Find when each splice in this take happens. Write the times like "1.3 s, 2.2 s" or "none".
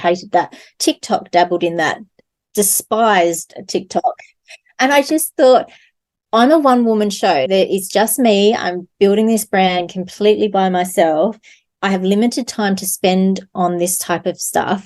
none